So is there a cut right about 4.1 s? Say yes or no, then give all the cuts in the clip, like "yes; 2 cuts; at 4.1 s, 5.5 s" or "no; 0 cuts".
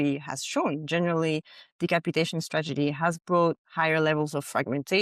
no; 0 cuts